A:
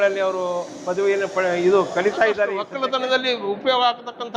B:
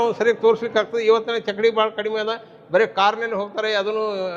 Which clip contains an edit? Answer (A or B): A